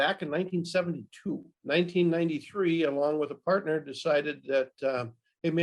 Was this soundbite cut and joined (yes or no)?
yes